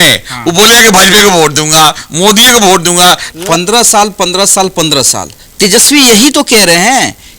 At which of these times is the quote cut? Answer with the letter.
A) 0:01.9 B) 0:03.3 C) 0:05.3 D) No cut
B